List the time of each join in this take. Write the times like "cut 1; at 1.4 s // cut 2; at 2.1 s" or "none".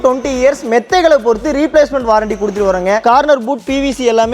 cut 1; at 3.0 s